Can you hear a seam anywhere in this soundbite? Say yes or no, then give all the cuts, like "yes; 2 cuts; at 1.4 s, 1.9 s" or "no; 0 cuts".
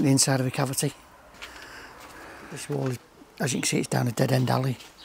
yes; 1 cut; at 2.6 s